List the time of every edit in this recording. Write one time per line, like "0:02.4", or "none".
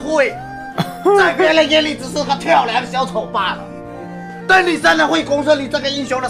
none